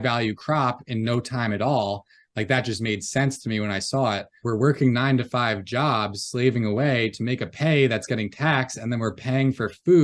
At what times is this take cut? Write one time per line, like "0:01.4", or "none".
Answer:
0:04.4